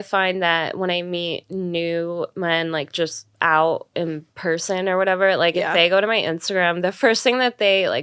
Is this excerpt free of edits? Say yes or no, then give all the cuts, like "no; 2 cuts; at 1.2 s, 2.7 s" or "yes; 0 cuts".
yes; 0 cuts